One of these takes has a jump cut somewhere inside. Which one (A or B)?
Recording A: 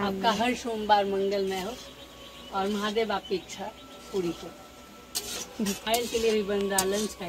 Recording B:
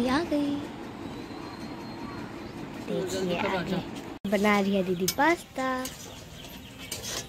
B